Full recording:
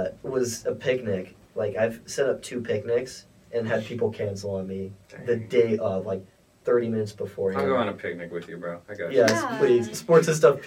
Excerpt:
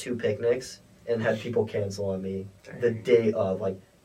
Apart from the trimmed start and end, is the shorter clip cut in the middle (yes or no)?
no